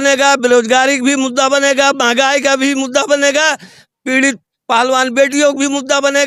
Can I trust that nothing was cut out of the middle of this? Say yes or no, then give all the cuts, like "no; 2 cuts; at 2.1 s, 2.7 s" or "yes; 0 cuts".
yes; 0 cuts